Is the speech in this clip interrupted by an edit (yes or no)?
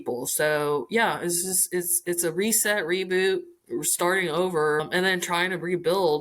yes